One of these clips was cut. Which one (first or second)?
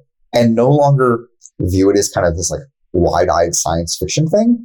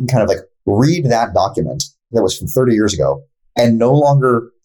second